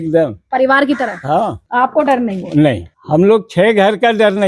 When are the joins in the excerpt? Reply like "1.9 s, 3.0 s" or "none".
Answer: 1.6 s, 2.9 s